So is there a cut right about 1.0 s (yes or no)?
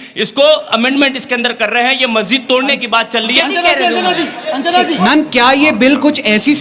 no